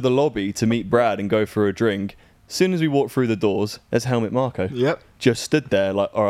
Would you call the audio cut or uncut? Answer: uncut